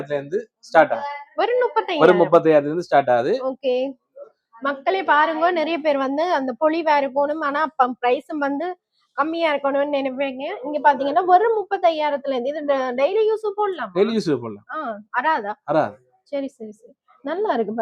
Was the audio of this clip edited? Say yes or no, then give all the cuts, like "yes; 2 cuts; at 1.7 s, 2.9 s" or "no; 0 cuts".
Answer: no; 0 cuts